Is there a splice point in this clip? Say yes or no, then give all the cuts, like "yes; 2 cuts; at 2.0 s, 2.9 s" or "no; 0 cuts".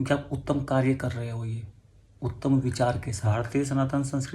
yes; 1 cut; at 3.1 s